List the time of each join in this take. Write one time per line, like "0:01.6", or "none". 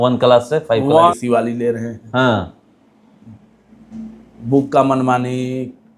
0:01.1